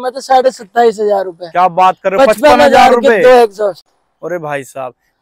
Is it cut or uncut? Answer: uncut